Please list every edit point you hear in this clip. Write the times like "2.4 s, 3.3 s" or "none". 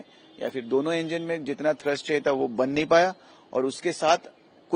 none